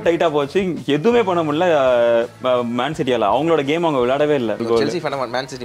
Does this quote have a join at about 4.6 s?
yes; 1 cut; at 4.6 s

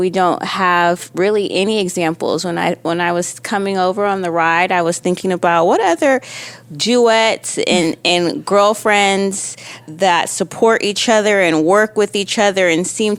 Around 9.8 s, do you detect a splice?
yes; 1 cut; at 9.8 s

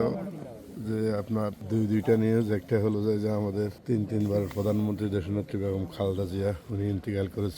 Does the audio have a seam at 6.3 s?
no; 2 cuts; at 1.6 s, 3.8 s

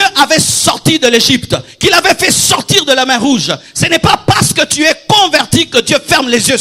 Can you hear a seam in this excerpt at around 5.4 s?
no; 0 cuts

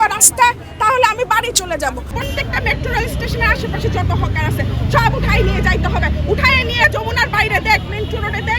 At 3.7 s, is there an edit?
no; 1 cut; at 2.1 s

